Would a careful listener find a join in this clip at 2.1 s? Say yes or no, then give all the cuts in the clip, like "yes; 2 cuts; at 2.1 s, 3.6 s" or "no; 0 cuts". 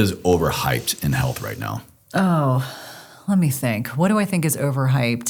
no; 0 cuts